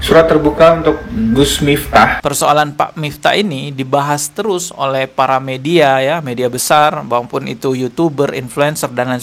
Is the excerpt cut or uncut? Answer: cut